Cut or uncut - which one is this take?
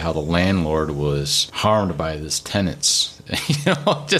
cut